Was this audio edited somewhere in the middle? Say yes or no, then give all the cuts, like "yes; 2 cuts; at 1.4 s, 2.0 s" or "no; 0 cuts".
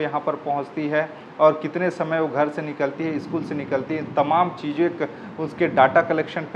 no; 0 cuts